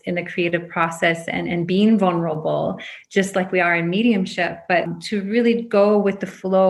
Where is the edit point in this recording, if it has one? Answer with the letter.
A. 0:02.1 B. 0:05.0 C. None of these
B